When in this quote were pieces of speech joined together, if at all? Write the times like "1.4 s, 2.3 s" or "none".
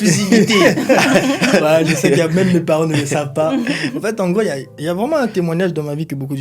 none